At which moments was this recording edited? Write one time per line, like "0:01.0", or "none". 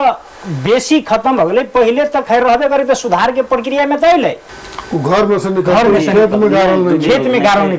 0:04.5